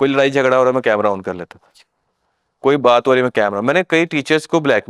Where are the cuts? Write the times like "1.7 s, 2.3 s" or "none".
none